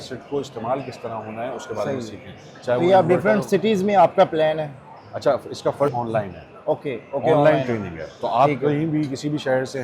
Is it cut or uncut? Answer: uncut